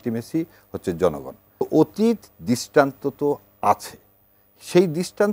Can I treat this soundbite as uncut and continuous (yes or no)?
no